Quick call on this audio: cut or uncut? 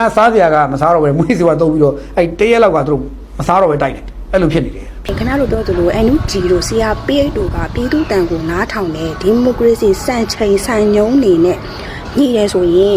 cut